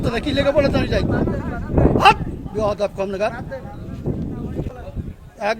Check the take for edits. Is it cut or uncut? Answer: cut